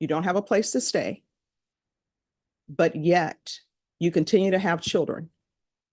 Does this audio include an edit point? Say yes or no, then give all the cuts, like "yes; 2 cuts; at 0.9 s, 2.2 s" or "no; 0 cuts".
no; 0 cuts